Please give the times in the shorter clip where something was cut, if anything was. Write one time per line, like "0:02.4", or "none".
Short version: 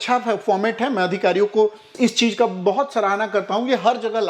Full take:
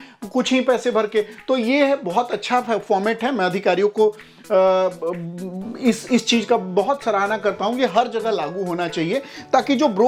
0:01.9